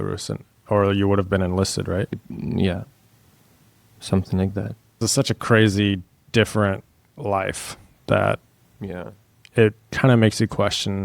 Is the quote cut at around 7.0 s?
no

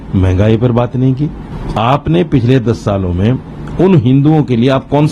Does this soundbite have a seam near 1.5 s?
yes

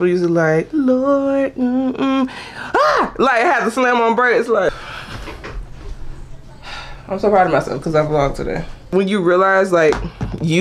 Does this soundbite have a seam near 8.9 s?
yes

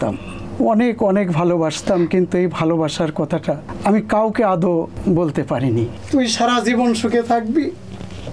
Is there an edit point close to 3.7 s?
yes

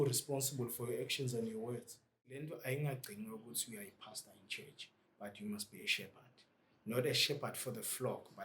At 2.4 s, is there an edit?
yes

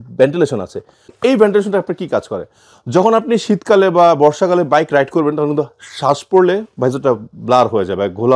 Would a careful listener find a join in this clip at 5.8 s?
no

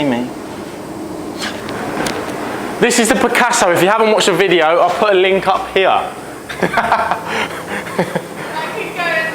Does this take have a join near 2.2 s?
no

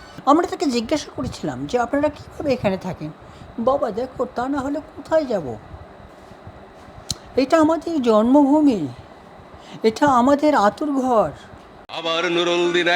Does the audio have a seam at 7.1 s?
no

